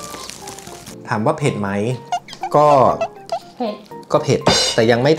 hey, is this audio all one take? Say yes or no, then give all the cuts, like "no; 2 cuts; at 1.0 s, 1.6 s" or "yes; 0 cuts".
yes; 0 cuts